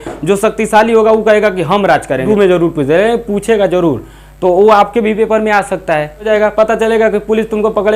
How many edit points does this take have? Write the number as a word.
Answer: two